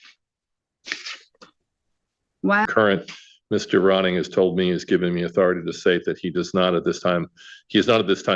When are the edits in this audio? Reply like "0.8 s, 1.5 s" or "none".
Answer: 2.7 s